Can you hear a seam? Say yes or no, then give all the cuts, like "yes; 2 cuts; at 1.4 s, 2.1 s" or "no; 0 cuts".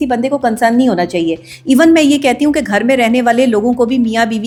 no; 0 cuts